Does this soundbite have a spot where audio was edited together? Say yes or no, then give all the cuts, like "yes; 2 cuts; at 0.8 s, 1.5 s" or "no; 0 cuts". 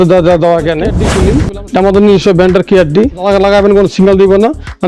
yes; 2 cuts; at 1.1 s, 3.2 s